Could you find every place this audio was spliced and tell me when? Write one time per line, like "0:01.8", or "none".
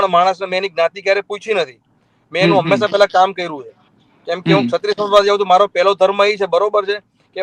none